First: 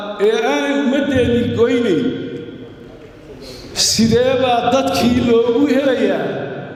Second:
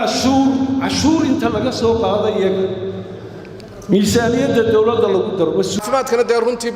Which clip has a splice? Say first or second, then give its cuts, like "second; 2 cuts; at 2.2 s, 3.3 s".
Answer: second; 1 cut; at 5.8 s